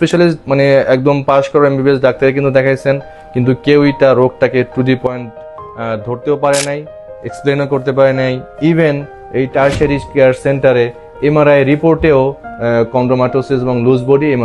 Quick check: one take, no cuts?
no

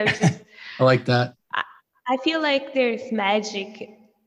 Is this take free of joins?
yes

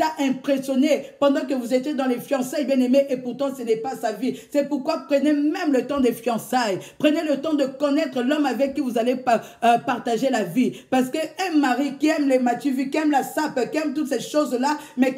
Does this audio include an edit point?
no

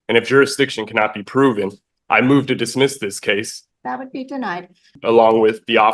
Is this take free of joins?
no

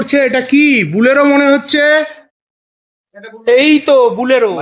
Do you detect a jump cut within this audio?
no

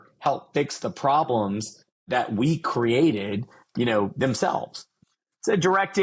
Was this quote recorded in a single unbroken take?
no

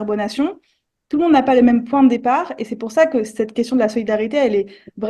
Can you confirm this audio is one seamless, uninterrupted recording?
yes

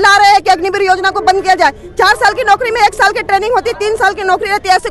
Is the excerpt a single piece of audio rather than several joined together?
yes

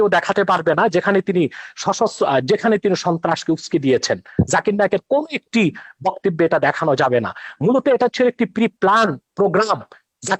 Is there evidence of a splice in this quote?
no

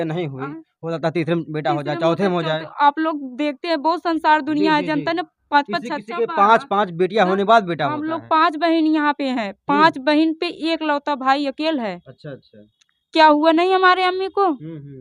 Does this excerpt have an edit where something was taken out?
no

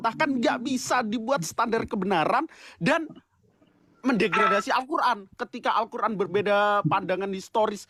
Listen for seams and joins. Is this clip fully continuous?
yes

